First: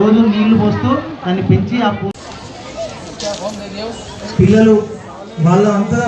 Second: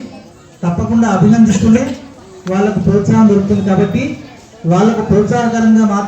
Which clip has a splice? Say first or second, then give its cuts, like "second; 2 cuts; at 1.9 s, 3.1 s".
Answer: first; 1 cut; at 2.1 s